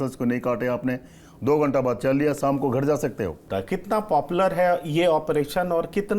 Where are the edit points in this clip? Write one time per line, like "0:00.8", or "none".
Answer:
0:03.4